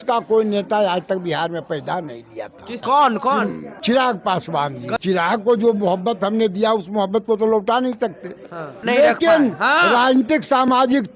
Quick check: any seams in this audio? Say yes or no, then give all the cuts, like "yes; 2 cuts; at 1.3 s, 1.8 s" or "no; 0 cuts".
yes; 4 cuts; at 2.8 s, 3.7 s, 5.0 s, 8.8 s